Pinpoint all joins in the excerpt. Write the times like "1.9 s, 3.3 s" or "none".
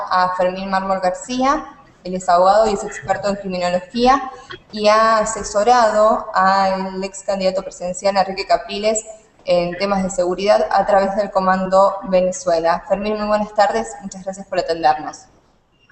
2.2 s